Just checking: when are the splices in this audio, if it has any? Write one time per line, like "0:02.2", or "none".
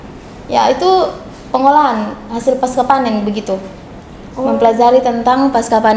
none